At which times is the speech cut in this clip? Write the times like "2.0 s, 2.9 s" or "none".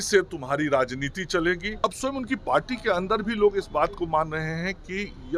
1.8 s